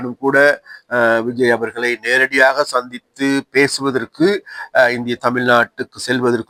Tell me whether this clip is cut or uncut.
uncut